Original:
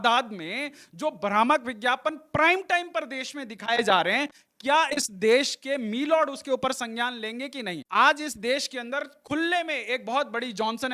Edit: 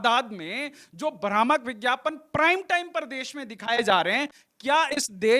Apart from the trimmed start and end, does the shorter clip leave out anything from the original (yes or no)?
no